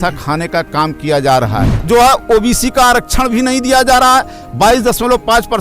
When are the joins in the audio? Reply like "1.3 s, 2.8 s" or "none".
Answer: 1.7 s